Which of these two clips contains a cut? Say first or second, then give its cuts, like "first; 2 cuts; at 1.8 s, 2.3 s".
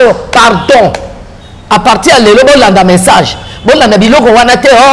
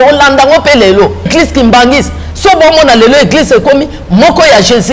second; 1 cut; at 1.3 s